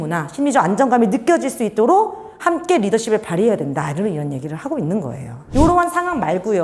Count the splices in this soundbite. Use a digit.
1